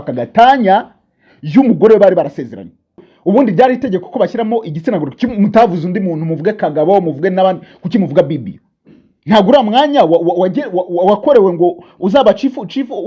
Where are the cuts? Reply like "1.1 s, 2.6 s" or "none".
3.1 s